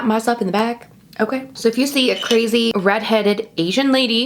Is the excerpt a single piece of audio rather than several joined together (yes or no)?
no